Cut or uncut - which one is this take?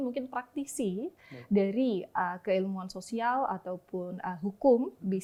uncut